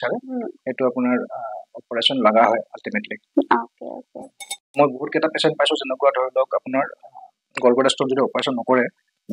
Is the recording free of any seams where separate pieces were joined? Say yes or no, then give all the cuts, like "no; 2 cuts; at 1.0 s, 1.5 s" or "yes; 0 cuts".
no; 2 cuts; at 4.8 s, 7.4 s